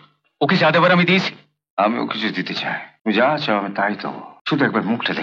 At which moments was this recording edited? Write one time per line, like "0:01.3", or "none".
0:02.9
0:04.3